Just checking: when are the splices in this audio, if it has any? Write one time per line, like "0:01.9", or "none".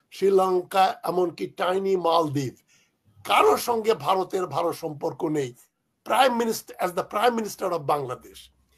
0:05.7